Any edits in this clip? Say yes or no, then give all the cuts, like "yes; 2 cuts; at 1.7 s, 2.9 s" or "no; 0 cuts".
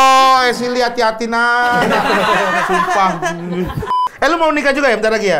yes; 1 cut; at 3.9 s